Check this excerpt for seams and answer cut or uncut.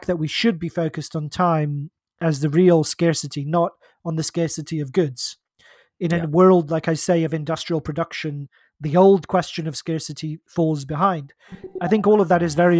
cut